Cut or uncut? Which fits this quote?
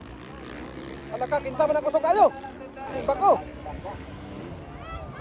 cut